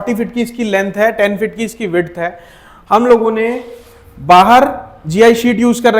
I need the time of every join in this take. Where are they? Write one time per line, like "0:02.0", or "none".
none